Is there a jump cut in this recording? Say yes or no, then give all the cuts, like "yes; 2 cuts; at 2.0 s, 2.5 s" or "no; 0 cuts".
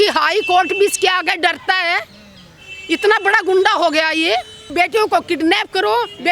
yes; 1 cut; at 4.7 s